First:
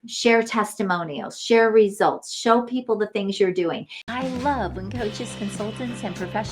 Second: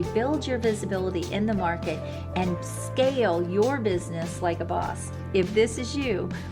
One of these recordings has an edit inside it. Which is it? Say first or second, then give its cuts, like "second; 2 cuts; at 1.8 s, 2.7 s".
first; 1 cut; at 4.0 s